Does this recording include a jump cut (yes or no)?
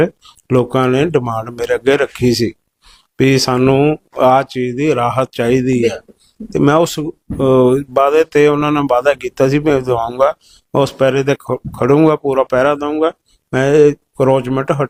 no